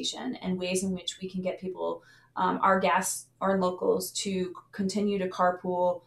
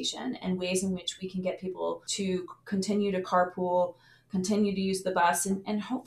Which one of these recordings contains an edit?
second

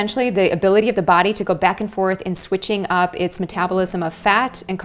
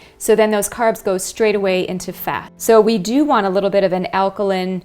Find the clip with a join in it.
second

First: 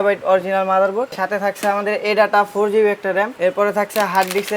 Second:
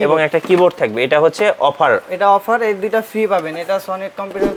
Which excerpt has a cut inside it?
first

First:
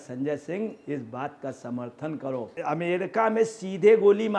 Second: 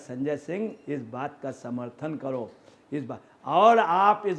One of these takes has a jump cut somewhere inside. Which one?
first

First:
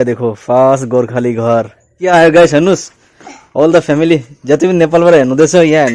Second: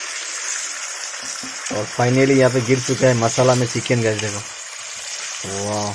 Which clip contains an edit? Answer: first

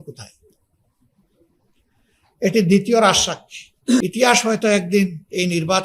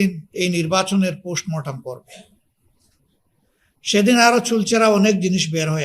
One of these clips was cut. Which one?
first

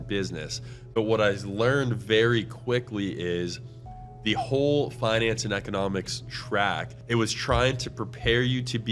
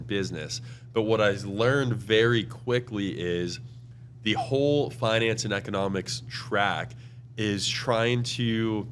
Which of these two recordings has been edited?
first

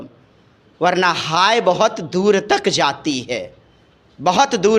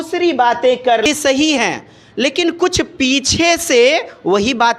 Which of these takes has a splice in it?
second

